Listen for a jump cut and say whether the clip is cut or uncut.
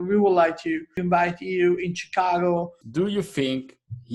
cut